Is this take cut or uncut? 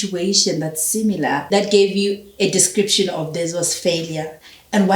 cut